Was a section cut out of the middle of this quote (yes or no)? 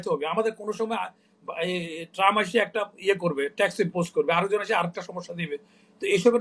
no